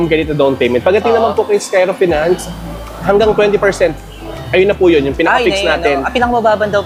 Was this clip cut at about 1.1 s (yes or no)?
no